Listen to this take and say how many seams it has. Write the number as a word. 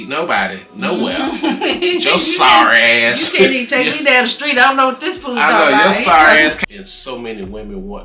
one